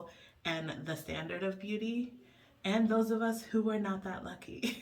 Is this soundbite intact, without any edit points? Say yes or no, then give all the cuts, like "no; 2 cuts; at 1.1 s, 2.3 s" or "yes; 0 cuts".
yes; 0 cuts